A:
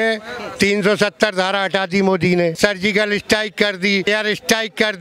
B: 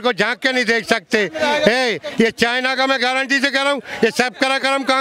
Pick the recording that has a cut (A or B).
A